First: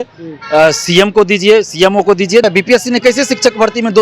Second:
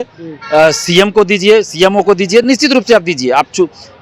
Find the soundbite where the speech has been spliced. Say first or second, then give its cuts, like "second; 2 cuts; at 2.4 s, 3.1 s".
first; 1 cut; at 2.4 s